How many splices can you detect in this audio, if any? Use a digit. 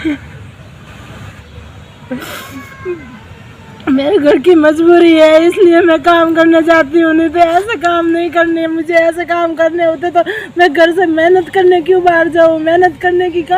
1